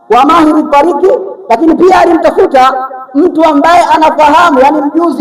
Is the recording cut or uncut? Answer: uncut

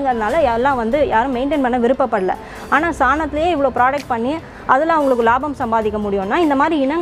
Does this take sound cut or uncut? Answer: uncut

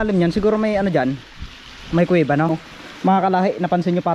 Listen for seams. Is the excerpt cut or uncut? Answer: cut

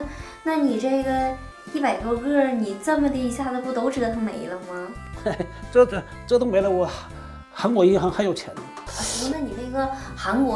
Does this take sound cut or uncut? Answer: cut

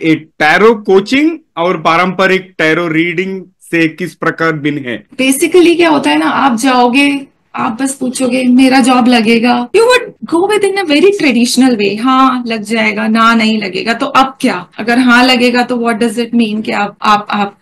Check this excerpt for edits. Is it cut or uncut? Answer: cut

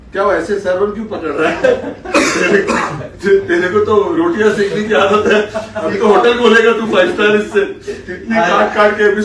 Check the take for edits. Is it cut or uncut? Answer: uncut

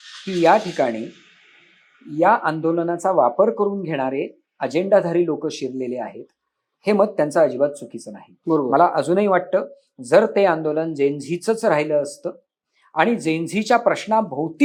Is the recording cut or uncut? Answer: uncut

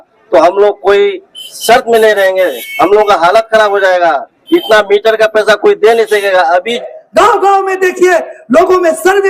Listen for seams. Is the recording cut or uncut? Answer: cut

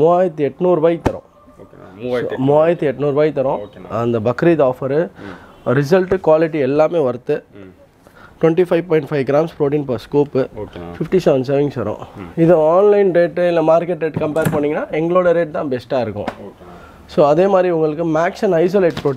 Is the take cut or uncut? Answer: uncut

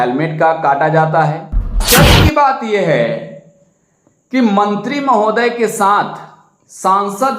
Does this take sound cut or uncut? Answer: cut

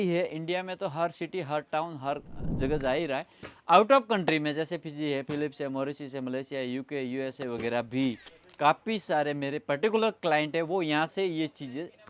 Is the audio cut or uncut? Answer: uncut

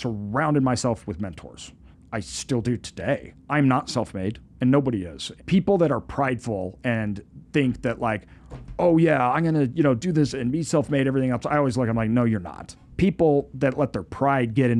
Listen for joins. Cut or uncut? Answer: cut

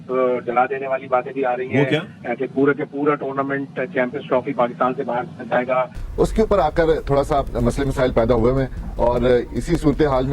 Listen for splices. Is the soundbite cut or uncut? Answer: cut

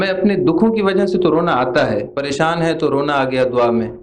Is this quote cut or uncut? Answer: cut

